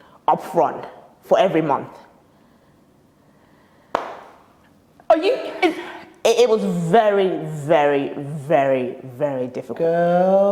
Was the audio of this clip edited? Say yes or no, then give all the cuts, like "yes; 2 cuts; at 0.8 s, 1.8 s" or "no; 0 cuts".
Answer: no; 0 cuts